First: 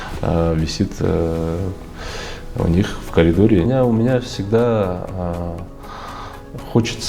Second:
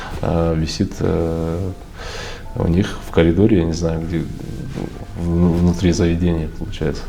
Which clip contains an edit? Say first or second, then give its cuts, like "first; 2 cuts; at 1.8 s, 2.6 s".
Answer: first; 1 cut; at 3.7 s